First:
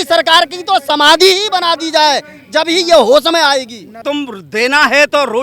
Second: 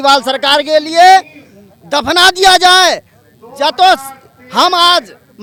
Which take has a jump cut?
first; 1 cut; at 4.0 s

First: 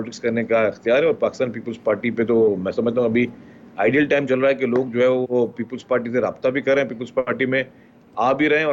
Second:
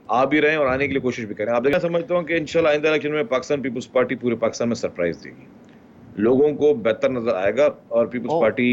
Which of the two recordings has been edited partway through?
second; 1 cut; at 1.7 s

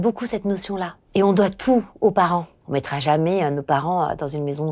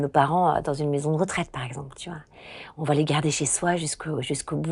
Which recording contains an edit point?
first; 2 cuts; at 0.9 s, 2.6 s

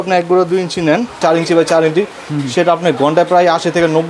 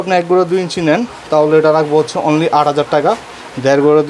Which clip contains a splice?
first; 1 cut; at 1.2 s

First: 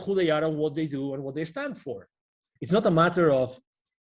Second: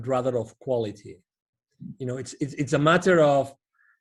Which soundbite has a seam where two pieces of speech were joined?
first; 1 cut; at 2.5 s

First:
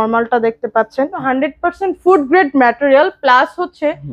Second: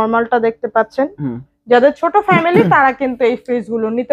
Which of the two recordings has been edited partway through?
first; 1 cut; at 1.2 s

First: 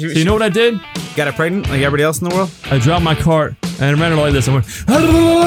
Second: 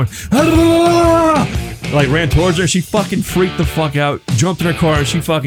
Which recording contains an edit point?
first; 3 cuts; at 1.0 s, 2.7 s, 3.6 s

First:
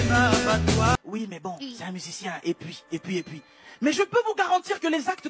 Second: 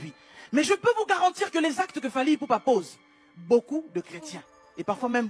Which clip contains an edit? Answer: first; 1 cut; at 1.0 s

